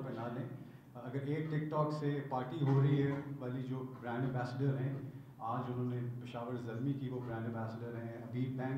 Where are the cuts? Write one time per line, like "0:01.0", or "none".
none